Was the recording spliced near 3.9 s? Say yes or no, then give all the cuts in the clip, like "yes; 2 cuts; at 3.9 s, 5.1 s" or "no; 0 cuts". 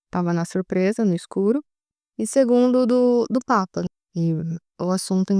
yes; 1 cut; at 3.9 s